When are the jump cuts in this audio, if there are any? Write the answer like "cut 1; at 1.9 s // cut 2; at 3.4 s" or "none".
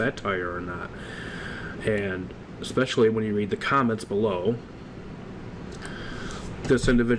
cut 1; at 3.4 s